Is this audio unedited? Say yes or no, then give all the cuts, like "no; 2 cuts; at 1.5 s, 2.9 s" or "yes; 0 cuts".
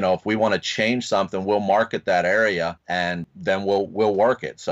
no; 1 cut; at 2.8 s